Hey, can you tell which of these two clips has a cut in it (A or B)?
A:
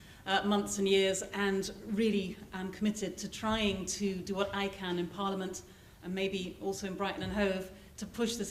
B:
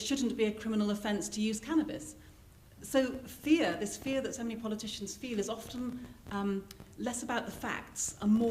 B